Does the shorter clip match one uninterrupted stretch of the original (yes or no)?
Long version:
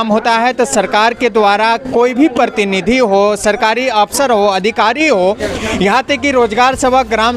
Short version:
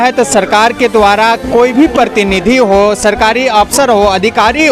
yes